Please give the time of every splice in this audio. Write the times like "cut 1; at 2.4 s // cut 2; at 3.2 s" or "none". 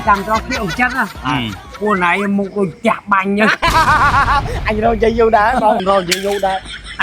cut 1; at 5.8 s